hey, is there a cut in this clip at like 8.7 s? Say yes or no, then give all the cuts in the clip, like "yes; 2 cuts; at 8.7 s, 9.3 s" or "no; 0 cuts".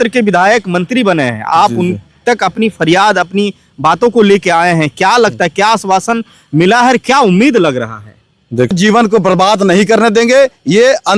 yes; 1 cut; at 8.7 s